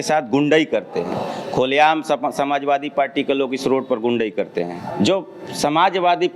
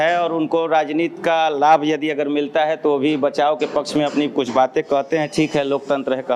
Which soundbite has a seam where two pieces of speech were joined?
first; 1 cut; at 4.8 s

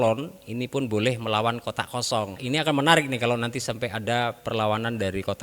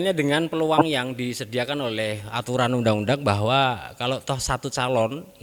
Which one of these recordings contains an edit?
first; 1 cut; at 2.4 s

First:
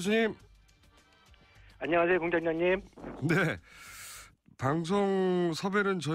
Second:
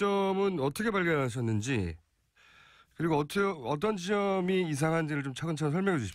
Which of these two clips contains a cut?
second; 1 cut; at 3.9 s

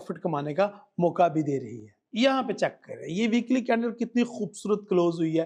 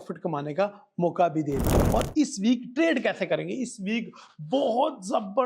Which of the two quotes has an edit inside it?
second; 1 cut; at 1.8 s

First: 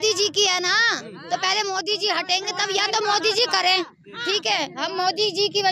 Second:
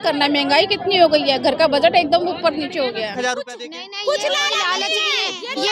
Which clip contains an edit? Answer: second; 1 cut; at 3.2 s

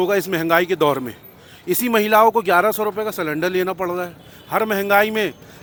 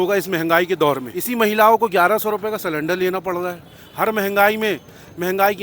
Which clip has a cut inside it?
second; 1 cut; at 1.1 s

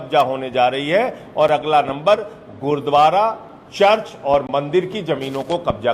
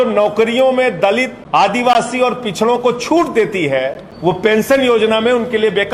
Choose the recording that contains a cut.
second; 2 cuts; at 1.4 s, 4.1 s

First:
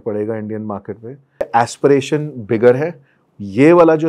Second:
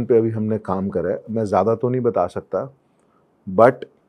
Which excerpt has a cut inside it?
first; 1 cut; at 1.4 s

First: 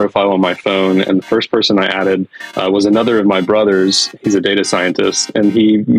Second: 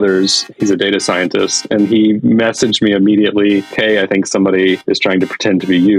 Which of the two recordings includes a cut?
second; 1 cut; at 3.7 s

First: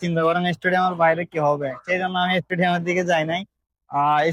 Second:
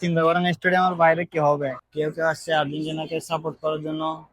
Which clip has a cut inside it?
second; 1 cut; at 1.8 s

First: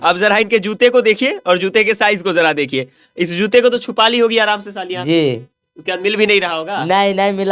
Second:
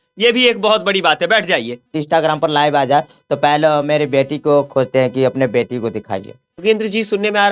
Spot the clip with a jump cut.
second; 2 cuts; at 2.0 s, 6.4 s

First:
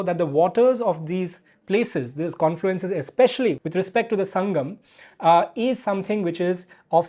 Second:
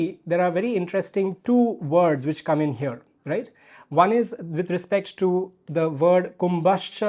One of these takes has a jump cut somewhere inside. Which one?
first; 1 cut; at 3.6 s

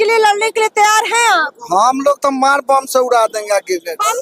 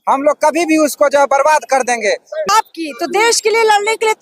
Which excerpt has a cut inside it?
second; 1 cut; at 2.5 s

